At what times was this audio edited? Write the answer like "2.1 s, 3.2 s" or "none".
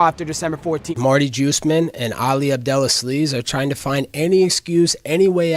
0.9 s